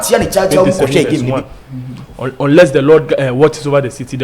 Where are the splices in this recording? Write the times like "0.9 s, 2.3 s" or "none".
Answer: 1.3 s